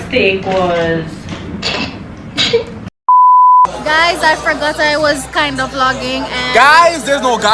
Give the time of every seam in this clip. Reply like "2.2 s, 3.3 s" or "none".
2.9 s, 3.7 s